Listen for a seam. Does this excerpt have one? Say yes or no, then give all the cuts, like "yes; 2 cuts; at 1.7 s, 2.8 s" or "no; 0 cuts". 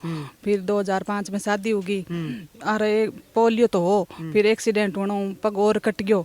no; 0 cuts